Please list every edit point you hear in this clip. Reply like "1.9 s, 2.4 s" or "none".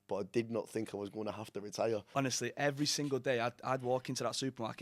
2.1 s